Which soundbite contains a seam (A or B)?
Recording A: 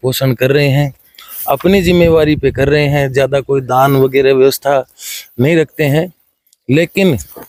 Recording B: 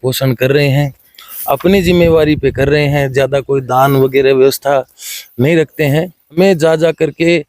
B